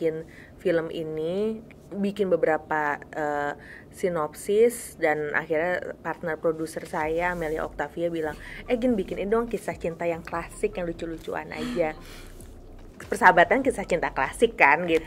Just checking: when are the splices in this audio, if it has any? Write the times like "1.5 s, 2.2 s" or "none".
none